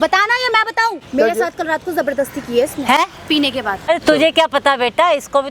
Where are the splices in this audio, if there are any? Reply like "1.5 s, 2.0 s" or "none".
1.0 s, 3.9 s